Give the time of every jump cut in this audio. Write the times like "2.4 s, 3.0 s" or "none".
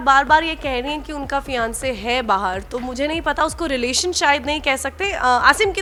none